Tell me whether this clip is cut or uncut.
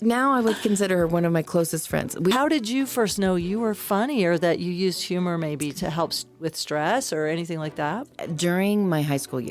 cut